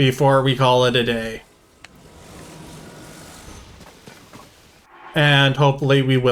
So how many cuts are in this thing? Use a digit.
0